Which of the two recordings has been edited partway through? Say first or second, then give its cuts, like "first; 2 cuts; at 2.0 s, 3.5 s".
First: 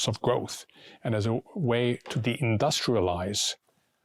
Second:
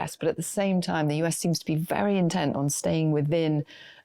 second; 1 cut; at 2.7 s